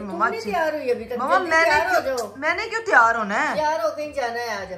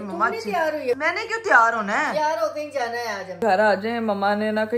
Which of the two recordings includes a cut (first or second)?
second